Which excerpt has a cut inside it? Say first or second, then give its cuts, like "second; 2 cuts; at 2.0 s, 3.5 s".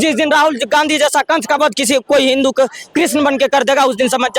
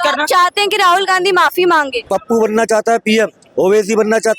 second; 1 cut; at 2.0 s